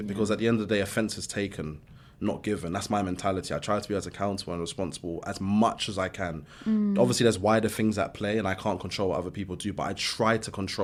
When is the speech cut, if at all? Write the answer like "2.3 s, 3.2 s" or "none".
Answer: none